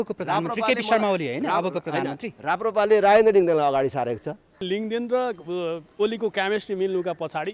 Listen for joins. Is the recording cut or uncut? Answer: cut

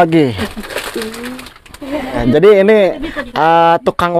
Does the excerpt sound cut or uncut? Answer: cut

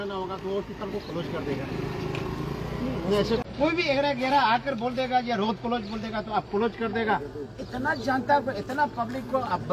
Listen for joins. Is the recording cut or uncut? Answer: cut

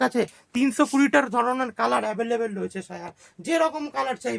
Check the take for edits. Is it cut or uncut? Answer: uncut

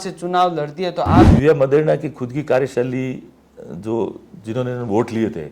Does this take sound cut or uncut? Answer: cut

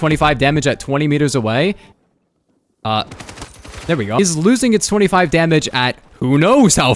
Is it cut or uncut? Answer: uncut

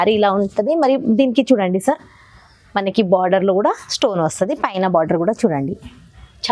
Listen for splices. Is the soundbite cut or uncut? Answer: uncut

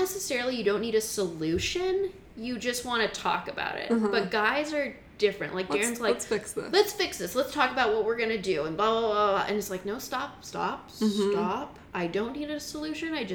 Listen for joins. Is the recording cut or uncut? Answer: uncut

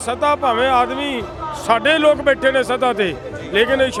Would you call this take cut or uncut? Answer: uncut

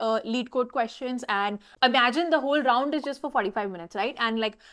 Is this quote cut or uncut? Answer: cut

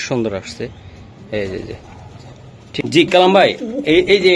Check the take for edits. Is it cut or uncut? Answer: uncut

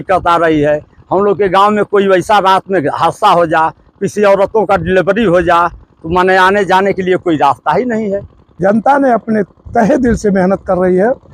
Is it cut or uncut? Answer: cut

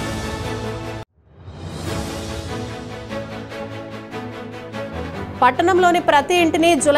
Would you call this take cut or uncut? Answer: cut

